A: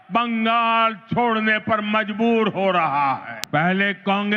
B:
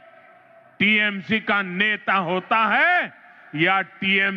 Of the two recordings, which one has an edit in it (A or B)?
A